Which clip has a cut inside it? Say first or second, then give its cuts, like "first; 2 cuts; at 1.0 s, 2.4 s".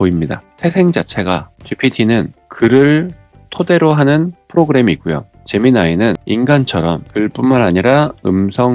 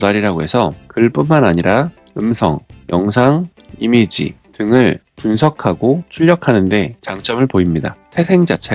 first; 2 cuts; at 6.2 s, 7.0 s